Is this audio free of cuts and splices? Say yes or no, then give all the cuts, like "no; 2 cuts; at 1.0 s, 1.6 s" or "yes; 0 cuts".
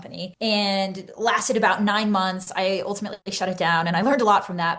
yes; 0 cuts